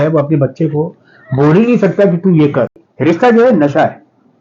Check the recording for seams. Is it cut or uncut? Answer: cut